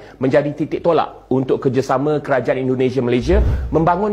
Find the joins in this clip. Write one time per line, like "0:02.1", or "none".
none